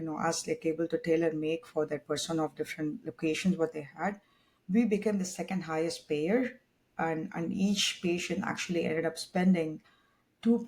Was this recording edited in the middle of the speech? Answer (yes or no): no